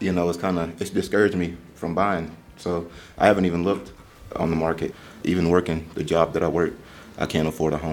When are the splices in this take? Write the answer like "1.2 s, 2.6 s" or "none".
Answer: 5.0 s